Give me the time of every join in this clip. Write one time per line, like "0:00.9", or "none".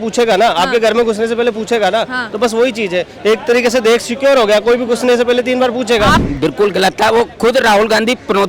0:06.2